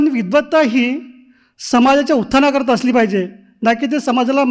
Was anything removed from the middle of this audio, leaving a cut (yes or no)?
no